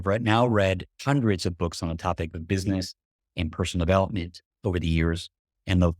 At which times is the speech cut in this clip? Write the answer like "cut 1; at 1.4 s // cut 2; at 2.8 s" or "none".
cut 1; at 0.9 s